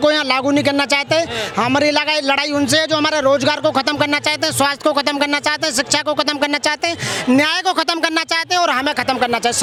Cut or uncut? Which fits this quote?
uncut